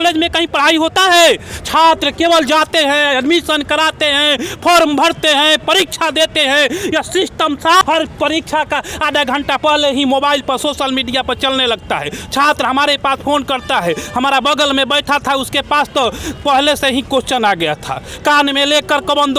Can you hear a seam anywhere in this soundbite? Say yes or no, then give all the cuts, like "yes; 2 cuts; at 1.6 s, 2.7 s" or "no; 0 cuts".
yes; 1 cut; at 7.8 s